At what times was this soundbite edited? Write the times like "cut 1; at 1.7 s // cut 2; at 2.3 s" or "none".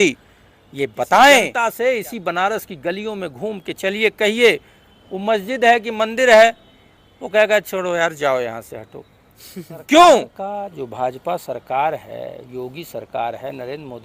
cut 1; at 1.5 s // cut 2; at 10.3 s